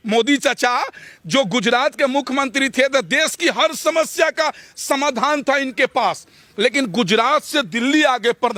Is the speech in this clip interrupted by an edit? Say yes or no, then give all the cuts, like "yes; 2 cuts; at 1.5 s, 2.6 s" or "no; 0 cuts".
no; 0 cuts